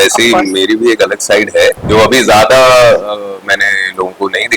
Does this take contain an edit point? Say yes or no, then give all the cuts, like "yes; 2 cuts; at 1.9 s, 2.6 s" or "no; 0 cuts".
yes; 1 cut; at 1.8 s